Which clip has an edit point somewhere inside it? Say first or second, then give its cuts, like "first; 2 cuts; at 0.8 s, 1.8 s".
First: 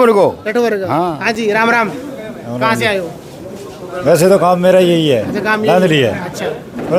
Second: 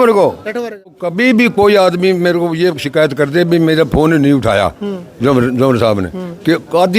second; 1 cut; at 0.9 s